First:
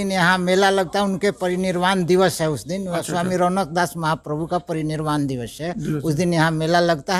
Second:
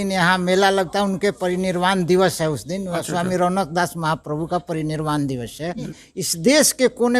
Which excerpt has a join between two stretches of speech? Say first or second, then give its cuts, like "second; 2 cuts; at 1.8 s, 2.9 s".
second; 1 cut; at 5.9 s